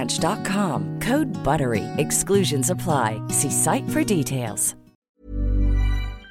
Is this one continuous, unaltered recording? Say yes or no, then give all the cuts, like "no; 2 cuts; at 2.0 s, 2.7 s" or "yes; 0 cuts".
no; 1 cut; at 4.9 s